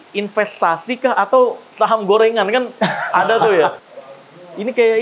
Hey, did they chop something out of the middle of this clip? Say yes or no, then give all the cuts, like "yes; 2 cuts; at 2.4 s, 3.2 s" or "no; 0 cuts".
yes; 1 cut; at 3.8 s